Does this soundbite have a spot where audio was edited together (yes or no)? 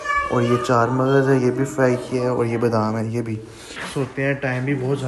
yes